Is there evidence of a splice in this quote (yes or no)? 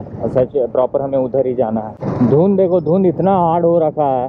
yes